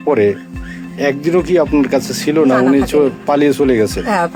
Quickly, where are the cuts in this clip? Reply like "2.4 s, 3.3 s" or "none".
none